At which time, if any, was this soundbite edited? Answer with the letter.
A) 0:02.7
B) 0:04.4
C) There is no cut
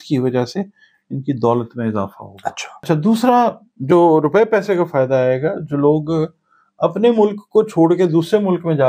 A